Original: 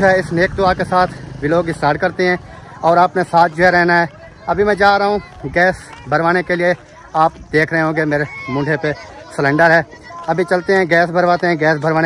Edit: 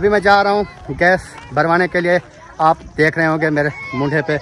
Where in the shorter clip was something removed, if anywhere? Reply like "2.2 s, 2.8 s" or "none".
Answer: none